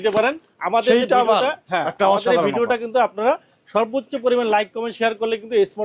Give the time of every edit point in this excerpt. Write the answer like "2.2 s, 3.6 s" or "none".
none